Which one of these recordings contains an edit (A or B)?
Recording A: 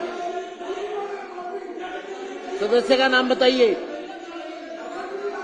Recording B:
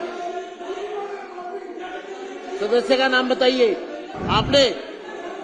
B